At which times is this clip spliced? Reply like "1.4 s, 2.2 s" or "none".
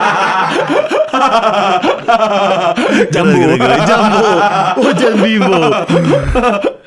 none

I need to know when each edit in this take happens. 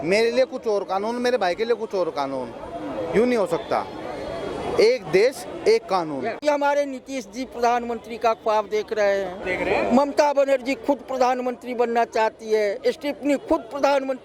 6.4 s, 9.4 s

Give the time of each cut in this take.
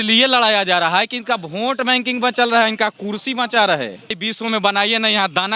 4.2 s

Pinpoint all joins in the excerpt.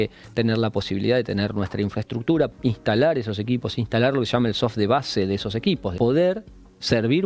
2.5 s, 5.9 s

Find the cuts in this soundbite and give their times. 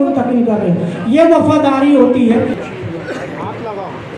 2.5 s

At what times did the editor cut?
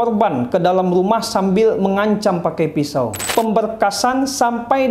3.2 s

